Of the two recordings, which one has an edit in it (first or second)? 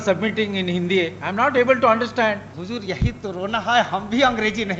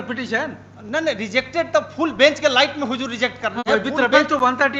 first